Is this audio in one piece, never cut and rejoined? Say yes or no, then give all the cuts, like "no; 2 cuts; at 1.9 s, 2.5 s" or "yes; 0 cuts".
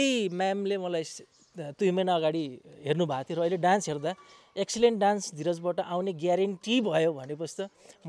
yes; 0 cuts